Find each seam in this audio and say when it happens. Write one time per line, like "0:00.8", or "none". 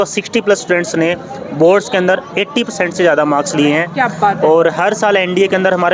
none